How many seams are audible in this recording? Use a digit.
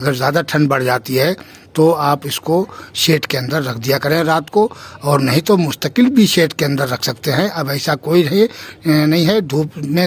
0